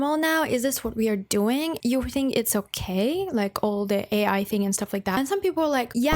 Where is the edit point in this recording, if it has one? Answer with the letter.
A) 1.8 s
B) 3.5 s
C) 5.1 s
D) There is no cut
A